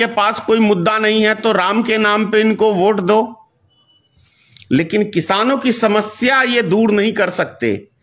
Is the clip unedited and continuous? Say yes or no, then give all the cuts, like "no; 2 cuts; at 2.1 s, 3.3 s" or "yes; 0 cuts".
yes; 0 cuts